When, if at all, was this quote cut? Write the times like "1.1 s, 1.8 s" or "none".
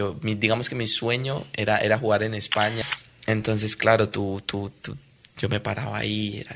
2.8 s